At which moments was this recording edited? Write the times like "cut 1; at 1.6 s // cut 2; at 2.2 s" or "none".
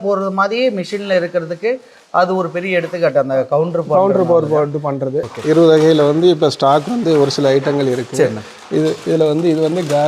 cut 1; at 5.3 s